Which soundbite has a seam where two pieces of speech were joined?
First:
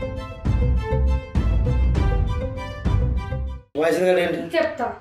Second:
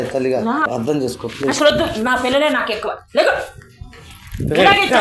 first; 1 cut; at 3.7 s

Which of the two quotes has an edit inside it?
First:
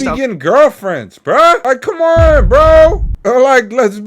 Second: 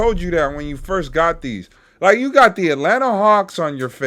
first; 2 cuts; at 1.6 s, 3.1 s

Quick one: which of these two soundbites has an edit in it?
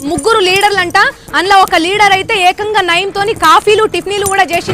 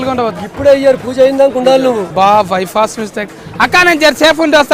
second; 1 cut; at 2.1 s

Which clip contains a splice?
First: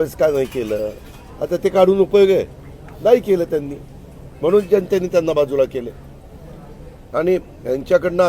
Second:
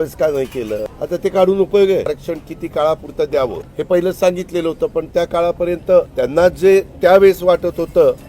second; 4 cuts; at 0.9 s, 2.1 s, 3.7 s, 6.1 s

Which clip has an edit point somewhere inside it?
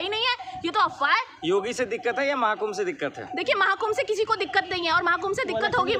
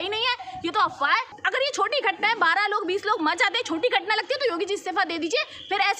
second; 1 cut; at 1.3 s

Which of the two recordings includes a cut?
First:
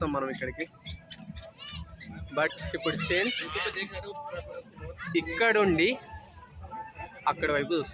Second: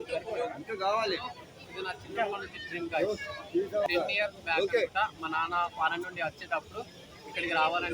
second; 1 cut; at 3.9 s

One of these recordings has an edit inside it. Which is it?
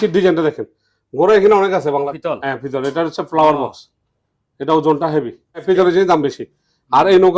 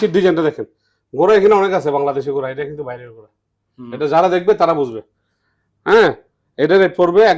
first; 2 cuts; at 2.1 s, 5.6 s

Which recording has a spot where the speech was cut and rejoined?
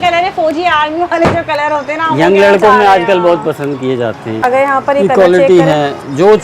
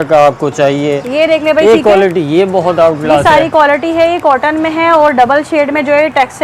first; 1 cut; at 4.4 s

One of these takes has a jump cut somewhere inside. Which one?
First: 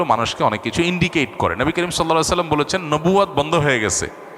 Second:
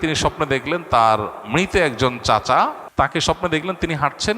second; 1 cut; at 2.8 s

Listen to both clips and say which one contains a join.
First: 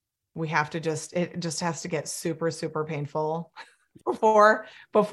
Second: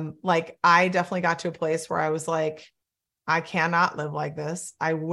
first; 1 cut; at 3.8 s

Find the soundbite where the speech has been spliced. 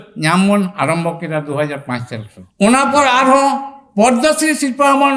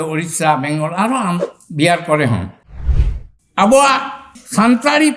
second; 1 cut; at 2.9 s

